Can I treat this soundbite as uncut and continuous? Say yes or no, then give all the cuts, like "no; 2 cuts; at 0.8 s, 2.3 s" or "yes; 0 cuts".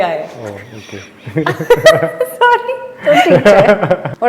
yes; 0 cuts